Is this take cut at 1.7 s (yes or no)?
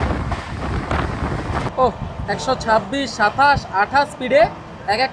yes